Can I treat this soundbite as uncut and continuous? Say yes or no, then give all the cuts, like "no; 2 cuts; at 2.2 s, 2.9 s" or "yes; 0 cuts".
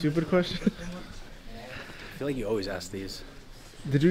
yes; 0 cuts